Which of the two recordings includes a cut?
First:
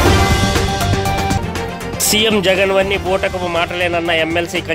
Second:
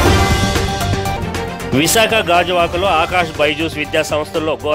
first; 1 cut; at 1.1 s

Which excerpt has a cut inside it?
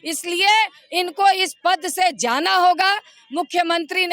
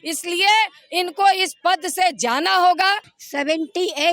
second; 1 cut; at 3.2 s

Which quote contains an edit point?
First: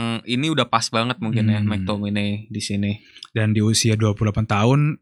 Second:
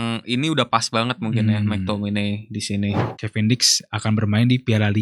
second; 1 cut; at 3.2 s

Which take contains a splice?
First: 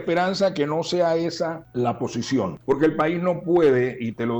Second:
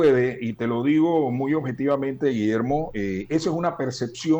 first; 2 cuts; at 1.6 s, 2.6 s

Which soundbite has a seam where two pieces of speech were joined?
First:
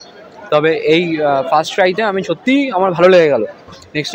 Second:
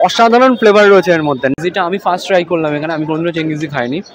second; 1 cut; at 1.5 s

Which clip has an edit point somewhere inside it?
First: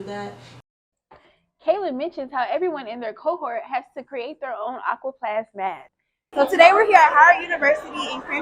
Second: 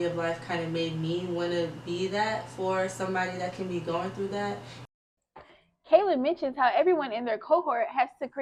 first; 1 cut; at 6.1 s

